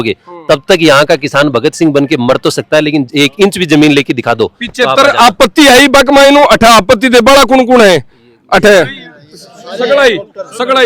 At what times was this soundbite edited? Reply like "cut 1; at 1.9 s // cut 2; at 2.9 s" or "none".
none